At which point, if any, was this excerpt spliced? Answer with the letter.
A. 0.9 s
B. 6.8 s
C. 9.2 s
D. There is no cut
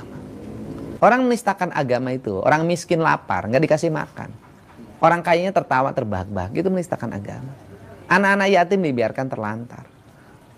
A